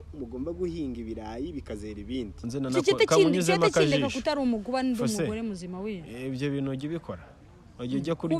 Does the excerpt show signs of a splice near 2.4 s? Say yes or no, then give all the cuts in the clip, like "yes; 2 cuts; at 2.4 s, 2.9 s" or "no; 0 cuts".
yes; 1 cut; at 2.4 s